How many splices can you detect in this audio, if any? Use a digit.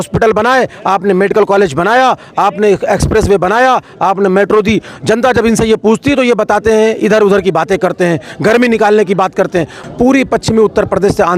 1